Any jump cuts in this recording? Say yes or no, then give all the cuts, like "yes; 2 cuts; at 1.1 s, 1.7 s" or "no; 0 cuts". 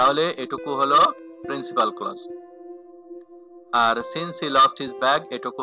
yes; 2 cuts; at 2.1 s, 3.7 s